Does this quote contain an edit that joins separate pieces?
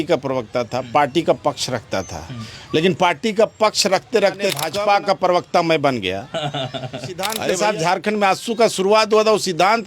yes; 2 cuts; at 4.7 s, 7.3 s

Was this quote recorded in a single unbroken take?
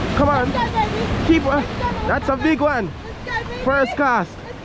yes; 0 cuts

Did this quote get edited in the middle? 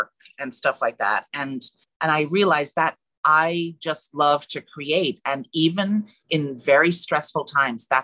yes; 2 cuts; at 1.8 s, 3.1 s

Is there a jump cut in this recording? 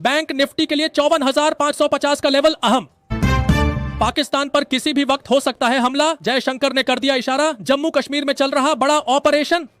yes; 1 cut; at 6.1 s

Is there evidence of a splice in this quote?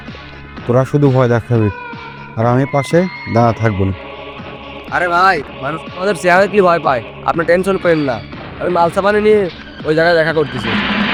no; 0 cuts

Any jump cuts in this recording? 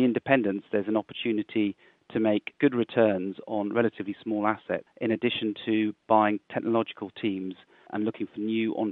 yes; 2 cuts; at 2.5 s, 4.9 s

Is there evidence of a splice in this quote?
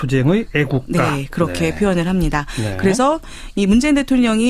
no; 0 cuts

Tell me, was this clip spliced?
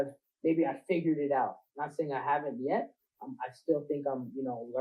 no; 0 cuts

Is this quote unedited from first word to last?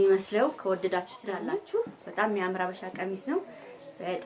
no; 1 cut; at 1.4 s

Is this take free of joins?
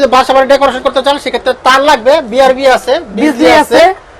yes; 0 cuts

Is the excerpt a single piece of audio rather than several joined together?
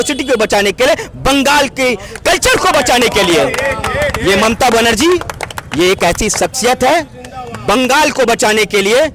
yes; 0 cuts

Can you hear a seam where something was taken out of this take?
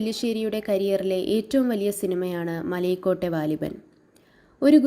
no; 0 cuts

